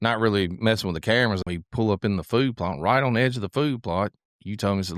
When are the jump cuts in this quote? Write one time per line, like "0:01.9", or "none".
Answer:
0:01.4